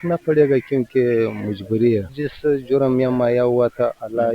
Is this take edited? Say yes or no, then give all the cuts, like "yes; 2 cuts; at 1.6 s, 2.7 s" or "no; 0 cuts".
yes; 1 cut; at 2.1 s